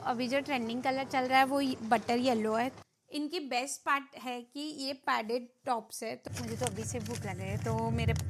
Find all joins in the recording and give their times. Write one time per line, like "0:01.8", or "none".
0:02.8
0:06.2